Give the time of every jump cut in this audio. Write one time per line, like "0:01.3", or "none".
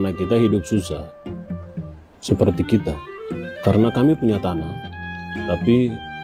none

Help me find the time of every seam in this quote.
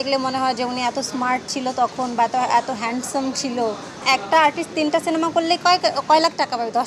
0:03.9

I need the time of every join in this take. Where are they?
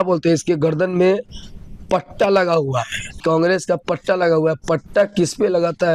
0:03.2

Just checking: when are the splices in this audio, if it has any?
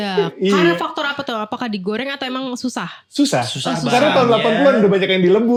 none

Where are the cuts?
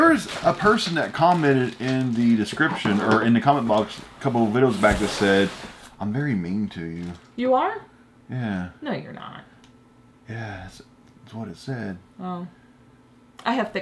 none

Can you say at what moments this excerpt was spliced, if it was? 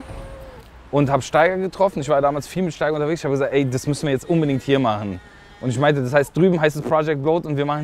none

